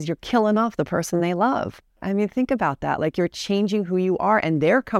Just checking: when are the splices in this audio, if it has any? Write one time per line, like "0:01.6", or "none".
0:02.1

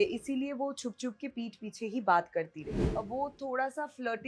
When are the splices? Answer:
0:02.8

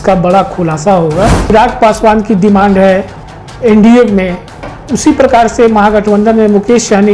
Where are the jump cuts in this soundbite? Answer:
0:01.5

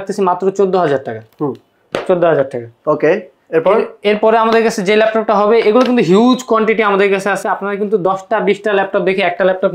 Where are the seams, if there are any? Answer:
none

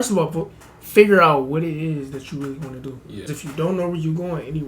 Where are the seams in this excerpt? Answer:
0:03.3

